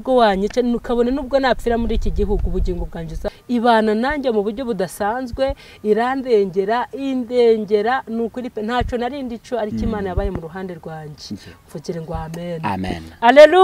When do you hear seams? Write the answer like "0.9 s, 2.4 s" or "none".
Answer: 3.3 s